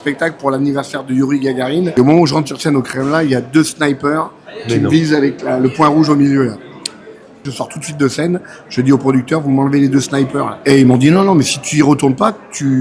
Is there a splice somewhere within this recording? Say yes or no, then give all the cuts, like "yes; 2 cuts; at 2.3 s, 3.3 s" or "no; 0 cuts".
yes; 3 cuts; at 1.9 s, 7.5 s, 10.5 s